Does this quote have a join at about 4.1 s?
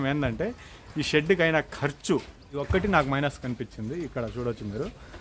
no; 1 cut; at 2.7 s

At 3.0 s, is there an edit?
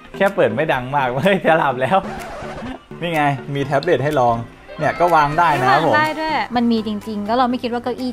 yes; 2 cuts; at 3.0 s, 6.5 s

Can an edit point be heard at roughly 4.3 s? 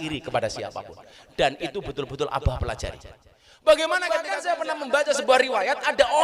yes; 1 cut; at 4.3 s

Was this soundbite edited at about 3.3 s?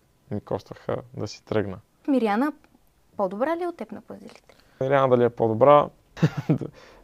no; 3 cuts; at 2.0 s, 4.8 s, 6.0 s

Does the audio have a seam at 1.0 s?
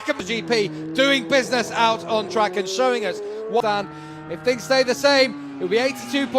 no; 1 cut; at 3.6 s

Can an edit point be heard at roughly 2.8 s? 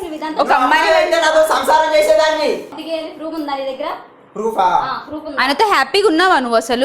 yes; 1 cut; at 2.8 s

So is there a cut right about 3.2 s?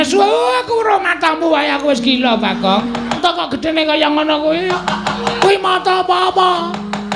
yes; 1 cut; at 3.2 s

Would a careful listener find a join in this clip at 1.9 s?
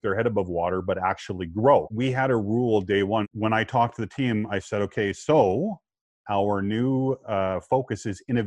yes; 2 cuts; at 1.9 s, 3.3 s

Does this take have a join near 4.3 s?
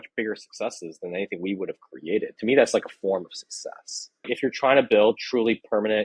yes; 1 cut; at 4.3 s

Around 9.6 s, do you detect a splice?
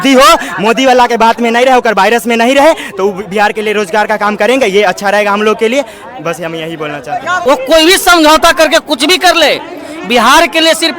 no; 1 cut; at 7.4 s

